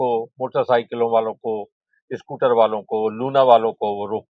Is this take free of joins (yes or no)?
yes